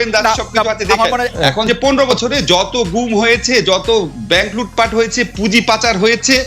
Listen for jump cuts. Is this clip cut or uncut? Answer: cut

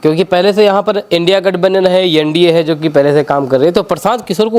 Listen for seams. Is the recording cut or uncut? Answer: uncut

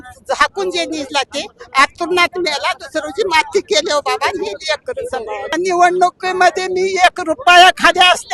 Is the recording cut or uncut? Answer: cut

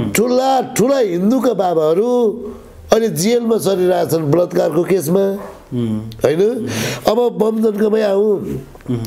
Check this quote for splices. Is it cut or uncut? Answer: uncut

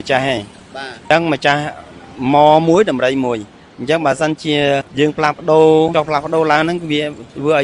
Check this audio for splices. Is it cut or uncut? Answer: cut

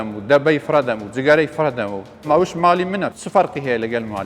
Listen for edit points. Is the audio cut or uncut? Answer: cut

